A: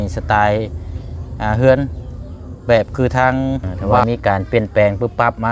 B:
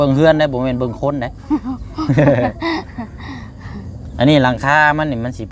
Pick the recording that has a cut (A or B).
A